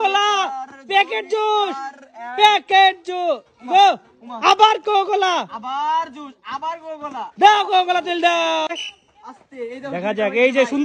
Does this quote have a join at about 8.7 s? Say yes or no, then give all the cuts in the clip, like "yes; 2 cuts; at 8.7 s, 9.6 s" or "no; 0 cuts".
yes; 1 cut; at 8.7 s